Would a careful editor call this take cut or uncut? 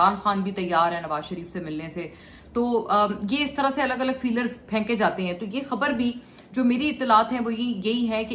uncut